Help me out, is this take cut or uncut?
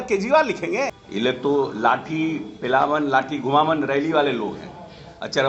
cut